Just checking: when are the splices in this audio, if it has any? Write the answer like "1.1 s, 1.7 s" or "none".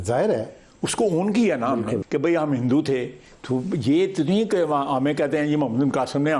2.0 s